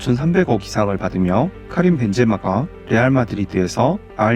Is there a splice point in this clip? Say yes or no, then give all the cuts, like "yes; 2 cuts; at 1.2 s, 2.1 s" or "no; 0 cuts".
yes; 1 cut; at 1.6 s